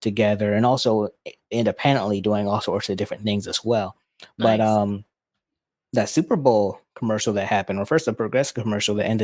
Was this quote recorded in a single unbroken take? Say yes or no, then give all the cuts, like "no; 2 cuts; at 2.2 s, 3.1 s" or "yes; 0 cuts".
yes; 0 cuts